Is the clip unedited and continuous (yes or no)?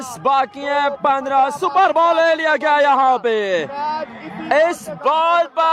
yes